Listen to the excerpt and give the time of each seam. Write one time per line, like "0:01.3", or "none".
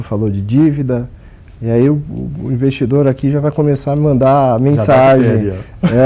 none